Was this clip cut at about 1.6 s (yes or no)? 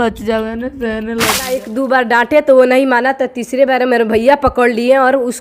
yes